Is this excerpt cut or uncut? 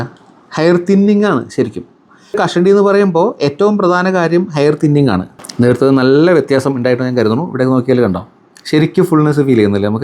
cut